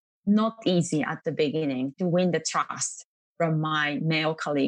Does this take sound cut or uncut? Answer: uncut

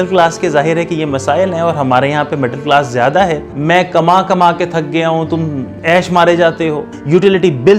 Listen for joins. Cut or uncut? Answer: cut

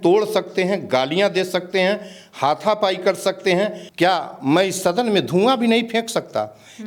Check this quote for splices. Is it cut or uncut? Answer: cut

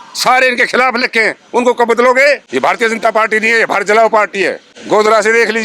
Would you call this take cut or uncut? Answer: cut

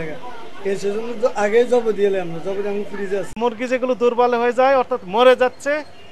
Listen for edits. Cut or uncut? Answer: cut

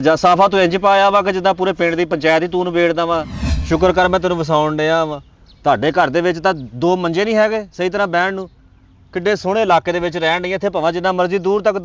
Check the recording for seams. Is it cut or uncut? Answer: cut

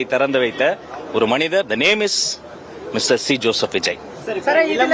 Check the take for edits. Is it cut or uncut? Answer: uncut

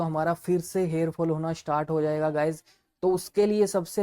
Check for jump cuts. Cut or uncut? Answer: uncut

